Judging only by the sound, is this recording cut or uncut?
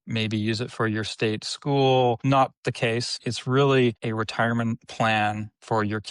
cut